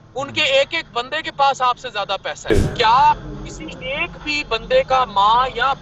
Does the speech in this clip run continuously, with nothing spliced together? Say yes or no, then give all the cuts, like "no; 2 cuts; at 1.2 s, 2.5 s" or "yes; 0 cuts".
no; 1 cut; at 2.5 s